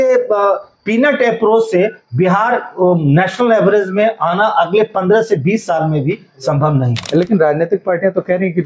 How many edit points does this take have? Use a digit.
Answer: 1